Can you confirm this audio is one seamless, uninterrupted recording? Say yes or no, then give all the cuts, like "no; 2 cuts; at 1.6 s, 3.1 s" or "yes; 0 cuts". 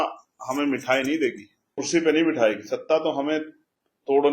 no; 1 cut; at 1.8 s